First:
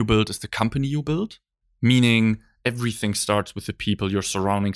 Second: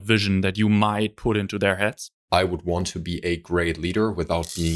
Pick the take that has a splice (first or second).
second